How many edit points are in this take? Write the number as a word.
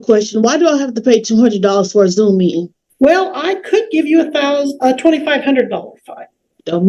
one